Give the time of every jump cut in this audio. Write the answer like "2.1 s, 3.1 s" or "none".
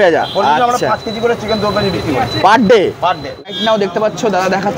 3.5 s